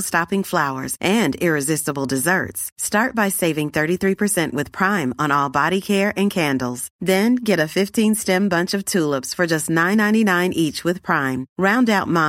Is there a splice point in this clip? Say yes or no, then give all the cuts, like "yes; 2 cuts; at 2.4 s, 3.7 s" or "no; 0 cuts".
no; 0 cuts